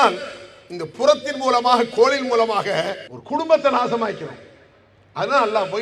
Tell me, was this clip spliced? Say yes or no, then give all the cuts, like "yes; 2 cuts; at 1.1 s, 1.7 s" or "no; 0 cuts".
no; 0 cuts